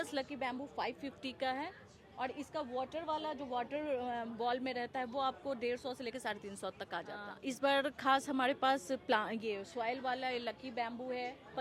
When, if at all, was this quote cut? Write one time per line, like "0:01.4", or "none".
0:07.2